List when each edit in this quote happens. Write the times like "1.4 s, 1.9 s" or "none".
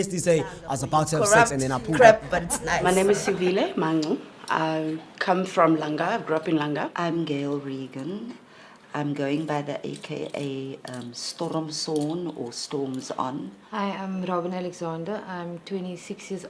10.2 s